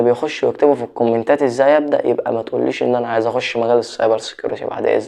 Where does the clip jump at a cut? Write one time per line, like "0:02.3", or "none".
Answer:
none

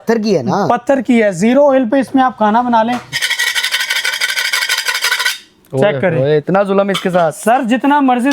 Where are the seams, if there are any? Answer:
0:03.2

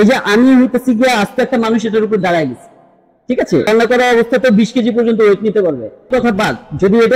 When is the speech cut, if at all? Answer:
0:03.7
0:06.1

